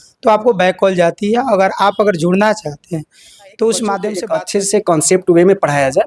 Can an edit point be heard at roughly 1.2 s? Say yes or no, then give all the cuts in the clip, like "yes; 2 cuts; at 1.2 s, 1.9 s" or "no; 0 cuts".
no; 1 cut; at 4.1 s